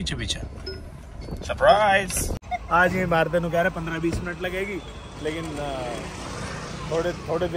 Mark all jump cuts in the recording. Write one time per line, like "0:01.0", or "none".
0:02.4